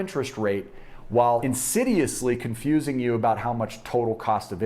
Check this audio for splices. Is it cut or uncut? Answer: cut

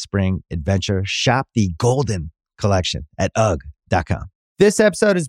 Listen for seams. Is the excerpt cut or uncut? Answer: cut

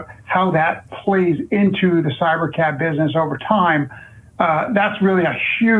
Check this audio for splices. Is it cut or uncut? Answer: uncut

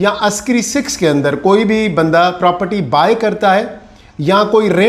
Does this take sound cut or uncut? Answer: uncut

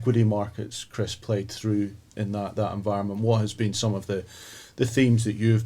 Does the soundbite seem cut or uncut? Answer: uncut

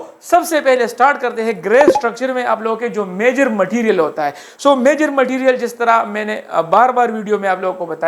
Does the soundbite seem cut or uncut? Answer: uncut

